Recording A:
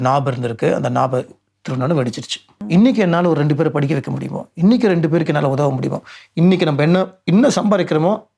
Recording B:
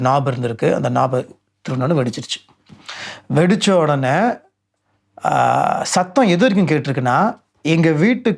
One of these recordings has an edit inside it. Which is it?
A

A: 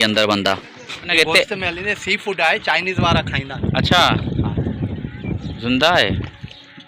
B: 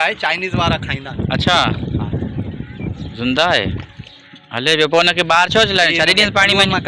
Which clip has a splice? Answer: A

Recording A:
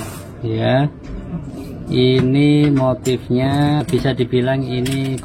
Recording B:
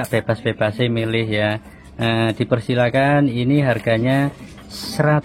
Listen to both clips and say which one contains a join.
A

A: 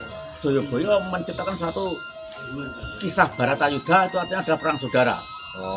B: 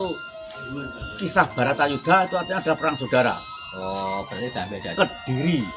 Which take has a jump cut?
B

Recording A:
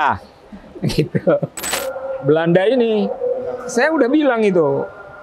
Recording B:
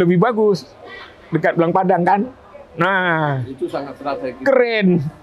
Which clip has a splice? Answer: A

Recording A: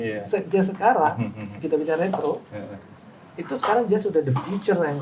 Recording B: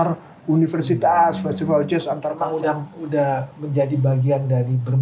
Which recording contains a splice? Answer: B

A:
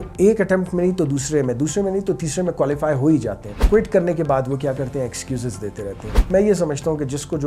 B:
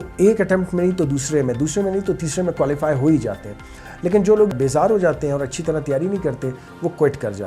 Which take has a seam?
A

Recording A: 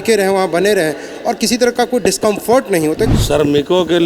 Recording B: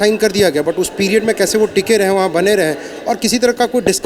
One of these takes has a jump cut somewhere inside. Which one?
A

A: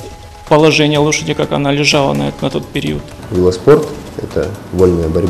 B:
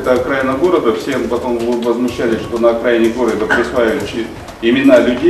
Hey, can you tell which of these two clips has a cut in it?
A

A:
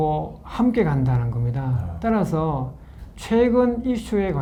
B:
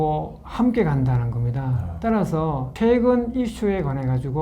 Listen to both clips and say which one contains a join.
B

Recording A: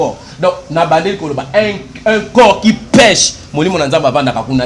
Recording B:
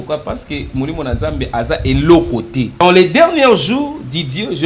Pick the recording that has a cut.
B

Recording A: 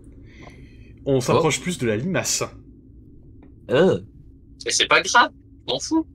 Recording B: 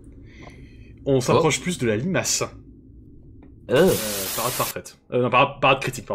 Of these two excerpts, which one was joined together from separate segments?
B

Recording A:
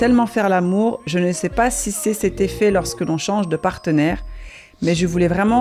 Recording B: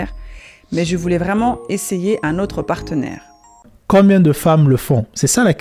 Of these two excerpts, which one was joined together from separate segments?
B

